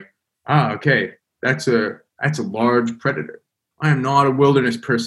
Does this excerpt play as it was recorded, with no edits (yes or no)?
no